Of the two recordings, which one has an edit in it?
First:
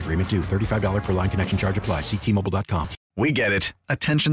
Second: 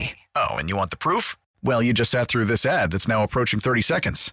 first; 1 cut; at 3.0 s

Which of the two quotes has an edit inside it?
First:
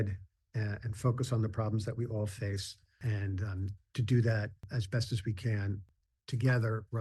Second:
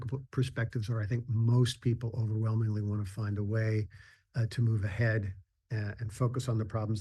first; 3 cuts; at 3.0 s, 4.6 s, 5.9 s

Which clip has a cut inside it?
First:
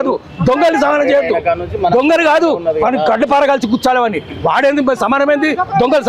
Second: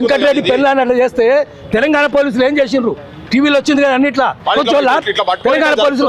second; 1 cut; at 4.4 s

